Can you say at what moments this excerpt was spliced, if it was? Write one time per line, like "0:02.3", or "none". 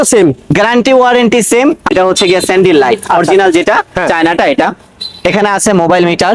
0:01.9